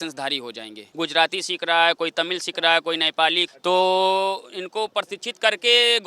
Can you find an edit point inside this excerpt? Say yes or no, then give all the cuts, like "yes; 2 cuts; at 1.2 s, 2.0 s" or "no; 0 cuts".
yes; 2 cuts; at 0.8 s, 3.4 s